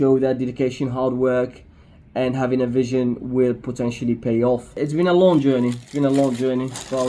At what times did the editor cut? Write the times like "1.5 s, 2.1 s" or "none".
4.7 s

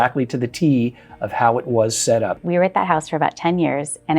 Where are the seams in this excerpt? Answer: 2.4 s

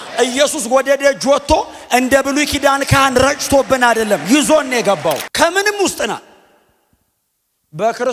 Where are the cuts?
5.3 s

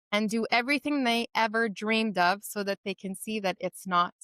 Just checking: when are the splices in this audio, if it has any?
none

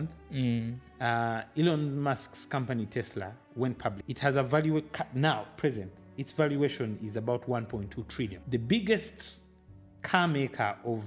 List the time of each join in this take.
4.0 s, 8.4 s

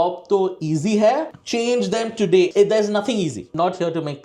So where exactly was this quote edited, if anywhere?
1.4 s, 2.5 s, 3.4 s

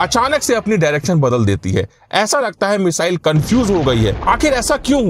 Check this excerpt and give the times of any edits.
4.2 s

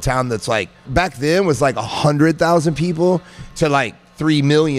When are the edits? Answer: 0.9 s, 3.4 s

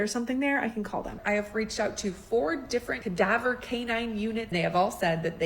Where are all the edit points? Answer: 1.2 s, 3.0 s, 4.5 s

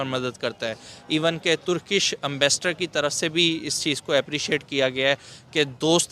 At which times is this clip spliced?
none

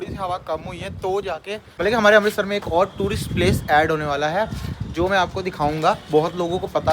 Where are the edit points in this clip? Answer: 1.7 s

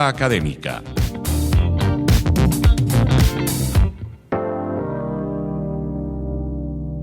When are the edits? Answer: 0.9 s

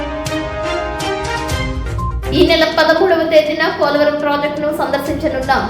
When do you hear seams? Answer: 1.6 s

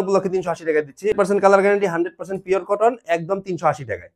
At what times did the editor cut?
1.1 s

